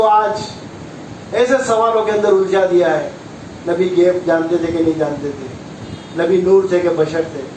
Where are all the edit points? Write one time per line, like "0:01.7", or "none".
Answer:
none